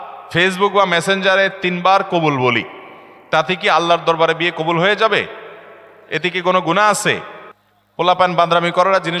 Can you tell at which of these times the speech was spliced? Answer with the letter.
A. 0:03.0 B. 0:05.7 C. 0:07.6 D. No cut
D